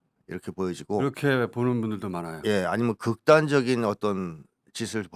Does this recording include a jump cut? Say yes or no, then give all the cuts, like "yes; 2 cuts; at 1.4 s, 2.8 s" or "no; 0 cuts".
no; 0 cuts